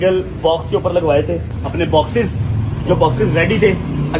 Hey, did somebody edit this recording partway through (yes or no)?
yes